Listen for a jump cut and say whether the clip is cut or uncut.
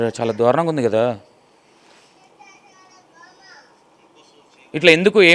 uncut